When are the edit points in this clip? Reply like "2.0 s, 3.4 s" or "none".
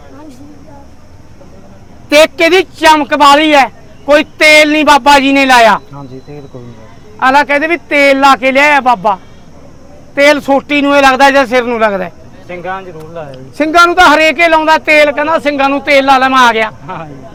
none